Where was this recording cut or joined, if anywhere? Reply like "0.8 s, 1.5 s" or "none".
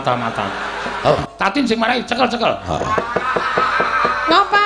0.9 s